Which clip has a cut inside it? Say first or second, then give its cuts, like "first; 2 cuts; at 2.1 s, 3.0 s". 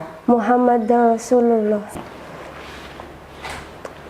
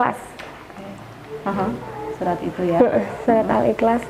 first; 1 cut; at 1.9 s